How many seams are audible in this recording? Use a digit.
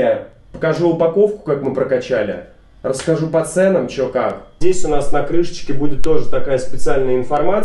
1